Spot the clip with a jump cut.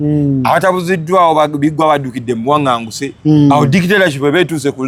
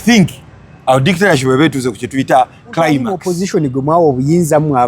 second; 1 cut; at 3.2 s

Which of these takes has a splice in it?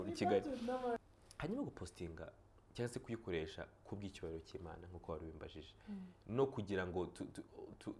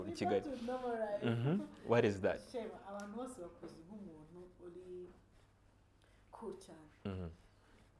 first; 1 cut; at 1.0 s

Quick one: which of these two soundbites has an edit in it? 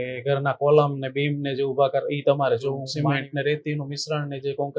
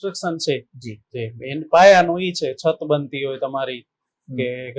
first; 1 cut; at 2.9 s

